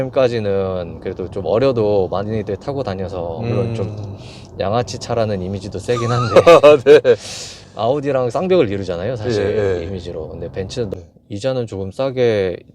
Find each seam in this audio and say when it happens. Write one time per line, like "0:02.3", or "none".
0:10.9

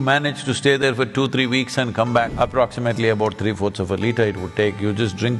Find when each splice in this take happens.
0:02.3

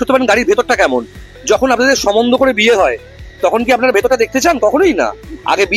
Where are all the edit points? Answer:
none

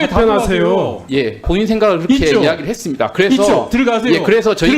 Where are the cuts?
0:01.5

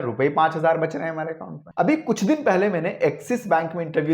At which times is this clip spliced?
0:01.5

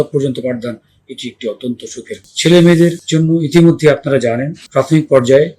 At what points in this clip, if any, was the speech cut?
0:02.3
0:03.0
0:04.6

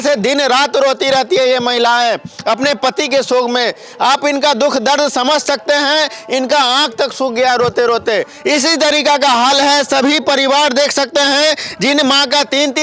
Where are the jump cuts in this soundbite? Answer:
none

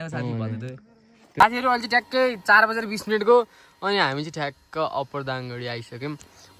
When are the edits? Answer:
0:01.2

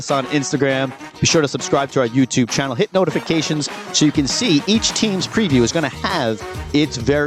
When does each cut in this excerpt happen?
none

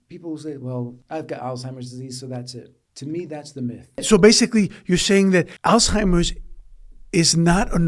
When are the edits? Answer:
0:01.0
0:02.8
0:04.0
0:05.5

